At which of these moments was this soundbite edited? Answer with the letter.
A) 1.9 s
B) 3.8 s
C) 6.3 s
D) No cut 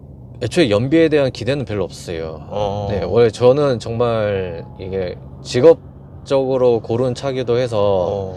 D